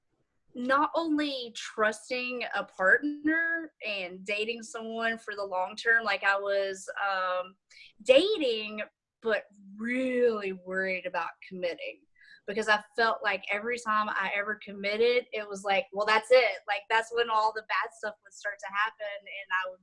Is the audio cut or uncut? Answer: uncut